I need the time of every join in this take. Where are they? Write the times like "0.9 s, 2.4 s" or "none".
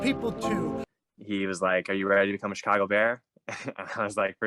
1.0 s